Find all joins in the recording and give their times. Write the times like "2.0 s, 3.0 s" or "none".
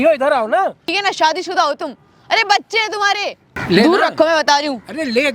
0.9 s, 3.5 s